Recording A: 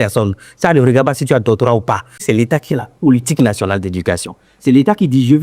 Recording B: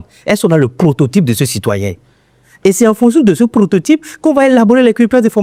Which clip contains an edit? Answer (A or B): A